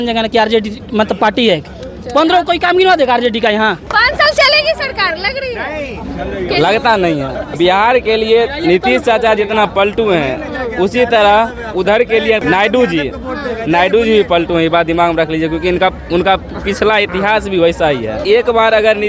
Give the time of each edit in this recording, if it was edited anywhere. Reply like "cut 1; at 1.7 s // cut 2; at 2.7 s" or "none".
cut 1; at 3.8 s // cut 2; at 7.5 s // cut 3; at 12.4 s // cut 4; at 18.2 s

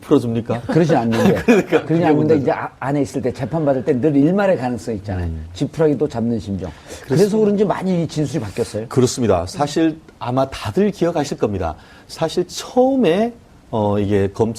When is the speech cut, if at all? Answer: cut 1; at 2.4 s

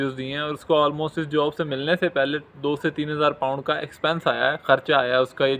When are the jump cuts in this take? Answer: none

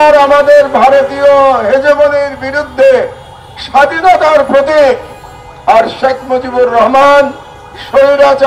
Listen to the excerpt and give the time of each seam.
none

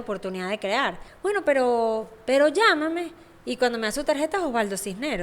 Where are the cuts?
cut 1; at 1.0 s

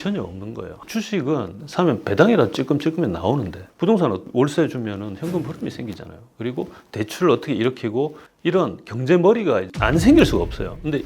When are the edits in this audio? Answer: cut 1; at 0.8 s // cut 2; at 3.6 s // cut 3; at 4.3 s // cut 4; at 8.2 s

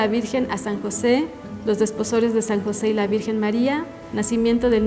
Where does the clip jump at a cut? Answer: cut 1; at 1.4 s // cut 2; at 4.0 s

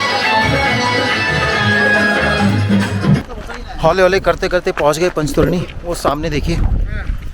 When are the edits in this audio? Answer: cut 1; at 3.2 s

